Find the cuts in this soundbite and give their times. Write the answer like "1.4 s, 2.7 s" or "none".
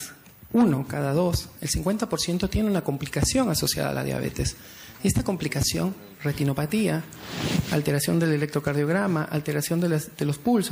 1.6 s